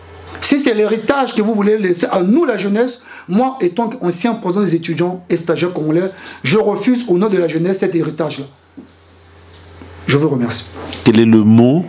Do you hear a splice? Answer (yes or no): no